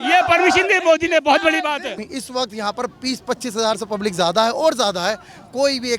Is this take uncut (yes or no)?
no